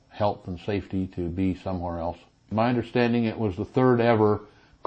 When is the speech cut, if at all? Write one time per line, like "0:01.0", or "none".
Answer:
0:02.5